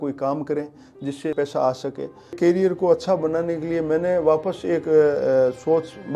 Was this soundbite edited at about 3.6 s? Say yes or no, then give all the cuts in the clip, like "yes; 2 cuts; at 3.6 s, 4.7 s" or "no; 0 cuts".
no; 2 cuts; at 1.3 s, 2.3 s